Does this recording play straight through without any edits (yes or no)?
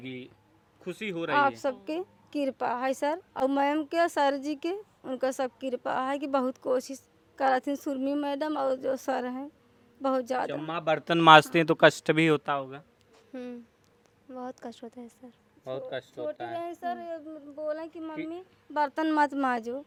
yes